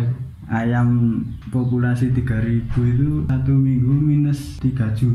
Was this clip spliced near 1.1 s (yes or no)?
no